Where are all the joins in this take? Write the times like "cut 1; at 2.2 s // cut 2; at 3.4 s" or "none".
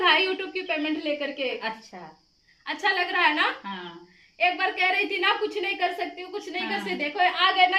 none